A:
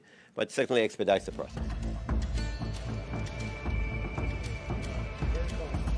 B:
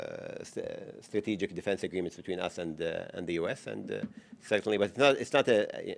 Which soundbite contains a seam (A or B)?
A